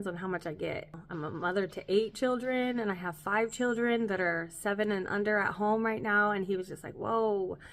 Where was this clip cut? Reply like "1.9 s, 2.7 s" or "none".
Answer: 1.0 s

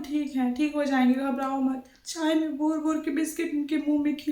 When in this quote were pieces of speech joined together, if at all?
2.0 s

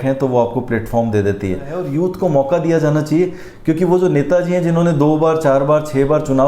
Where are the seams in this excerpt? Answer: 1.9 s

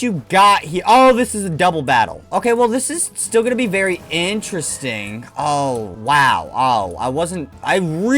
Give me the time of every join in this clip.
none

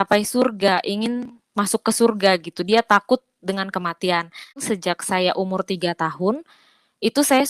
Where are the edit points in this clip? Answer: 4.6 s

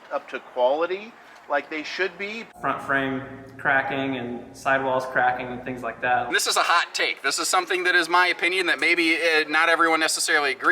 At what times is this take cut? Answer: 2.4 s, 6.3 s

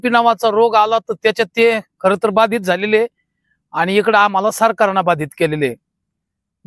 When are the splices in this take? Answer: none

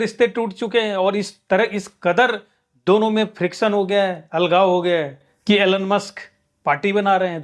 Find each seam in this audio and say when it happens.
none

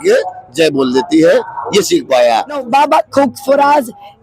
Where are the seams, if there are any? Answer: 2.6 s

